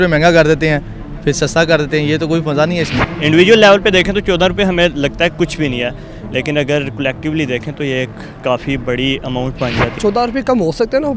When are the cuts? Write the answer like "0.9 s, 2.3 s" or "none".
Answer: 3.1 s, 9.9 s